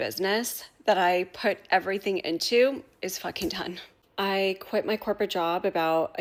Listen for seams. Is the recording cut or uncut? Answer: uncut